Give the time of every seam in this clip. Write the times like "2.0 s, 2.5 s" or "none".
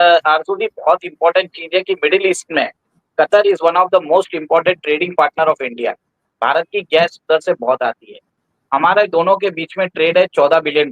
none